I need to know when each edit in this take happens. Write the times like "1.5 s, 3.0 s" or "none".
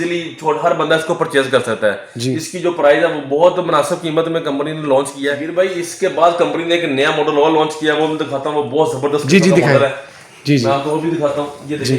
5.4 s